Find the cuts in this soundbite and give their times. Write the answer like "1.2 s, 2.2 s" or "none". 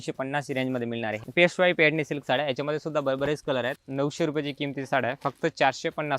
1.2 s, 3.8 s